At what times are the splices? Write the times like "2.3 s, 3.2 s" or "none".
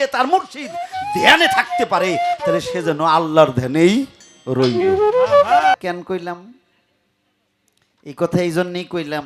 5.7 s